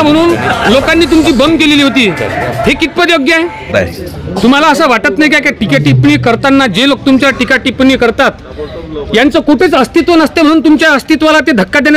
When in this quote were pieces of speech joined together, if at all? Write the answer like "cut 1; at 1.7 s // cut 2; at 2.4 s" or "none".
cut 1; at 3.7 s

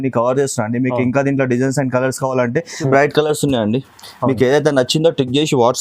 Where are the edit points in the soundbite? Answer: cut 1; at 2.9 s

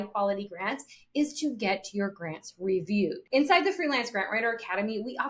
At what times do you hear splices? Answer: cut 1; at 3.2 s

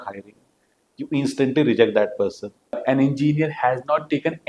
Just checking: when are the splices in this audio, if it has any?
cut 1; at 2.8 s

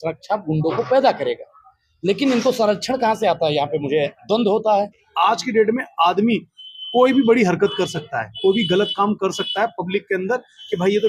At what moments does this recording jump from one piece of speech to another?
cut 1; at 5.0 s

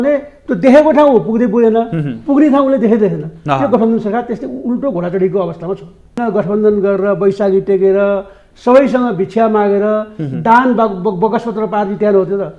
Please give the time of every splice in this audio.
cut 1; at 6.2 s

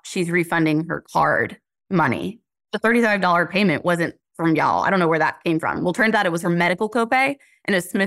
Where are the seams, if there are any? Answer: none

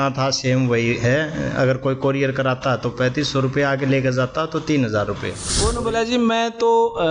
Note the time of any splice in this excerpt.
cut 1; at 5.4 s

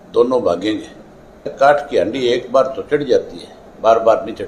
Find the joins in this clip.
cut 1; at 1.5 s

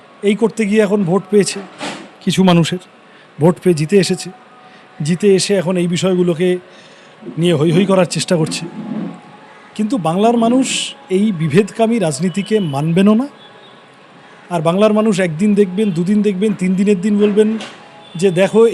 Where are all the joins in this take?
none

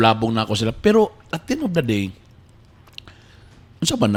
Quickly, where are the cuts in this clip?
none

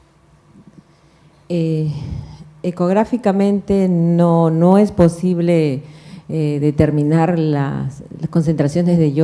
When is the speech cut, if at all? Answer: none

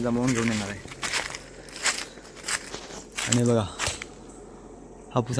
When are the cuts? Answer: cut 1; at 0.9 s

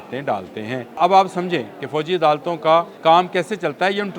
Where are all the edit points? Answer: cut 1; at 1.0 s // cut 2; at 2.9 s

